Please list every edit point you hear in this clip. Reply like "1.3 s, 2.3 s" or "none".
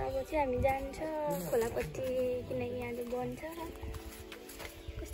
none